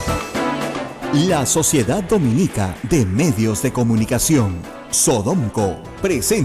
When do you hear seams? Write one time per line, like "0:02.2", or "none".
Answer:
0:00.9